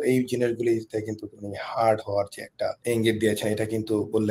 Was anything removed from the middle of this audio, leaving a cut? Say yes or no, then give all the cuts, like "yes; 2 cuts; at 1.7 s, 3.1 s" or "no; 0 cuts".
yes; 1 cut; at 2.8 s